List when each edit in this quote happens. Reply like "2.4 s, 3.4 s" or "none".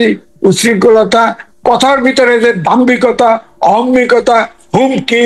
none